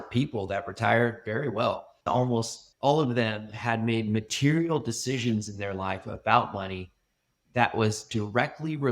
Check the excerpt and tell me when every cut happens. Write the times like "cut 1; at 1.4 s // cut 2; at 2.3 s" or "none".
cut 1; at 2.0 s